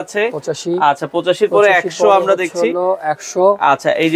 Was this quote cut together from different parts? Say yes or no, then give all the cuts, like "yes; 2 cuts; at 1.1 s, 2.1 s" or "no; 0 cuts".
no; 0 cuts